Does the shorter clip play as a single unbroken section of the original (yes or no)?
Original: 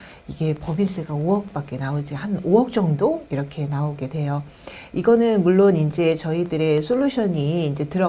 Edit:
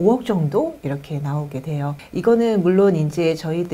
no